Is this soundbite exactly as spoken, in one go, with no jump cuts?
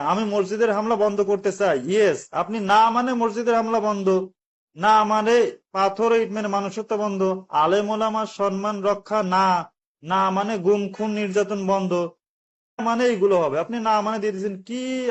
no; 1 cut; at 12.8 s

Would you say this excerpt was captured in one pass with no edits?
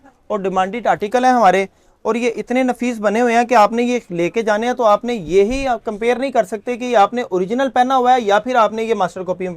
yes; 0 cuts

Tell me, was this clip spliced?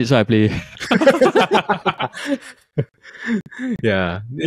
no; 0 cuts

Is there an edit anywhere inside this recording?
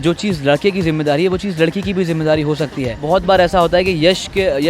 yes; 1 cut; at 2.9 s

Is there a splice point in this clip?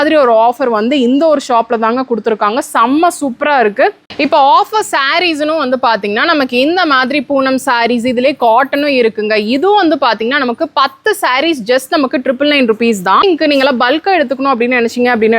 yes; 2 cuts; at 4.1 s, 13.2 s

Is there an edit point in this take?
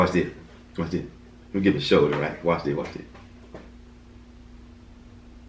no; 0 cuts

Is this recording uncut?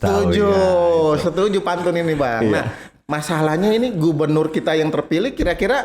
yes; 0 cuts

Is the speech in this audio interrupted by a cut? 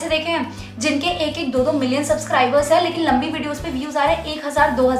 no; 0 cuts

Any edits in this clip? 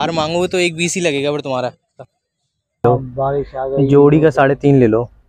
yes; 1 cut; at 2.8 s

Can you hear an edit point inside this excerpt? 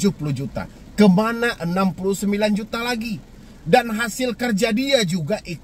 no; 0 cuts

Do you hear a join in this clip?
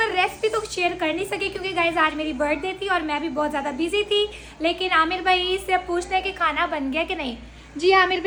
no; 0 cuts

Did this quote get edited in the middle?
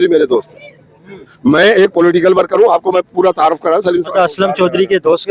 no; 0 cuts

